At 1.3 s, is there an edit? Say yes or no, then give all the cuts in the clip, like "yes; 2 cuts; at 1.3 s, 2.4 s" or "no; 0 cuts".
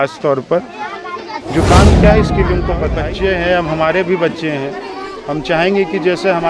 no; 1 cut; at 2.9 s